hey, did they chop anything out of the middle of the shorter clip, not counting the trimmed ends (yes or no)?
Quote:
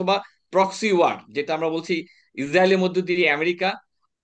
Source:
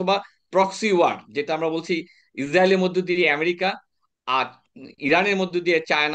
no